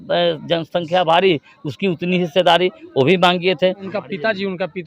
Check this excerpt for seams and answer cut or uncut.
cut